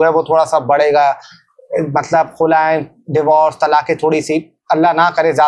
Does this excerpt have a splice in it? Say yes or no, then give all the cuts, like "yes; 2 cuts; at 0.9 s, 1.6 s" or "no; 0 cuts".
no; 0 cuts